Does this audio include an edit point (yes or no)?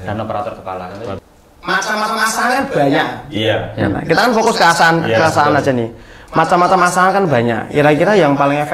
yes